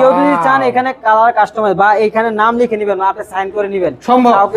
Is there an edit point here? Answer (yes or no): no